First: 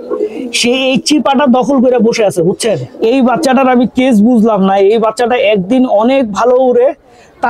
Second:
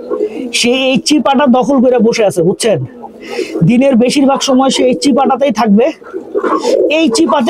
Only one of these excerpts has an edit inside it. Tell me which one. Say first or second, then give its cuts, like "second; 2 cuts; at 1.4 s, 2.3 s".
first; 1 cut; at 2.9 s